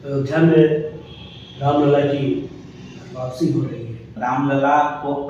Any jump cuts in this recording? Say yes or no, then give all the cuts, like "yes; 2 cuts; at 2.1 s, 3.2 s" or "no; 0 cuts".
yes; 1 cut; at 4.1 s